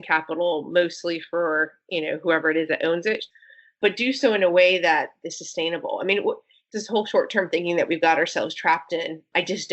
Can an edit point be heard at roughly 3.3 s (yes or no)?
yes